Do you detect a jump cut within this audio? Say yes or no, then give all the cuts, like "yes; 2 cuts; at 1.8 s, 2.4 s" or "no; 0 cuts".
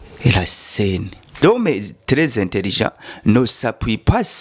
yes; 1 cut; at 1.4 s